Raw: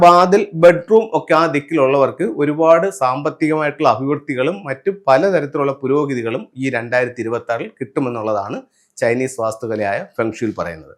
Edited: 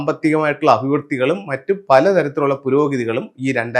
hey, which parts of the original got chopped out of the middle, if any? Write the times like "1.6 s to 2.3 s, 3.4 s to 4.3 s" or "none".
none